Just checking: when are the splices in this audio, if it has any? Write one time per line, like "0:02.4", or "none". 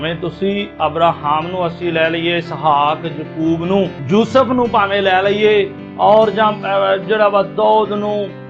0:04.0